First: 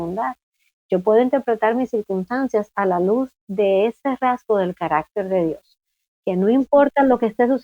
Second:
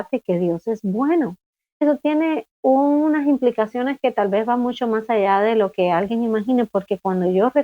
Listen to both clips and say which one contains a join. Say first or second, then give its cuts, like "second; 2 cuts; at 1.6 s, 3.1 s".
second; 1 cut; at 1.8 s